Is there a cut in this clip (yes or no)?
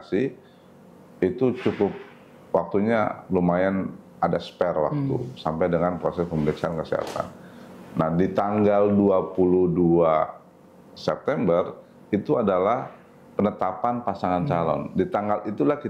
no